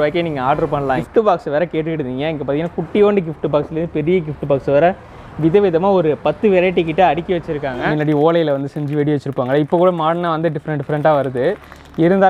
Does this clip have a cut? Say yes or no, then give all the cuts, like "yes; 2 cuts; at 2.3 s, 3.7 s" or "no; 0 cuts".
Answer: yes; 2 cuts; at 1.0 s, 7.8 s